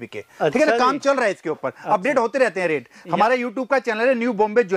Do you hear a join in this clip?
no; 0 cuts

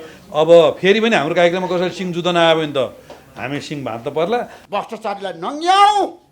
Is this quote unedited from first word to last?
no; 1 cut; at 4.6 s

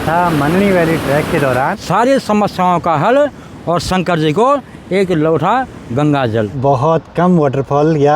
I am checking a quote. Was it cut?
yes; 2 cuts; at 1.7 s, 6.6 s

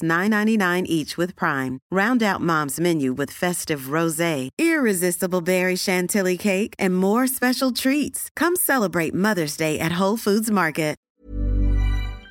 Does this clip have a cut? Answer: yes; 1 cut; at 11.1 s

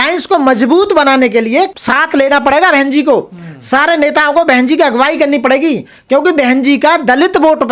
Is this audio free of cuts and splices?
no; 1 cut; at 1.7 s

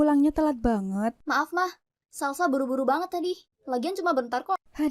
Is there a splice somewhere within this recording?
yes; 2 cuts; at 1.2 s, 3.5 s

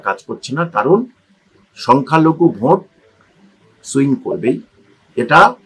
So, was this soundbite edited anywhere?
no; 0 cuts

